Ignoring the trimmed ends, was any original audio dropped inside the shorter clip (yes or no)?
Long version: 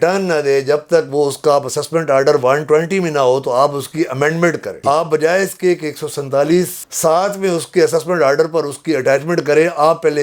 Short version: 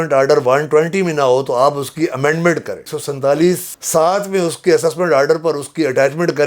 yes